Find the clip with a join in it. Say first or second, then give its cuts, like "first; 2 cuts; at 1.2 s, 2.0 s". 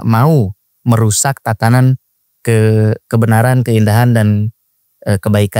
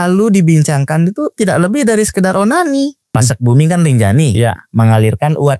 second; 1 cut; at 3.1 s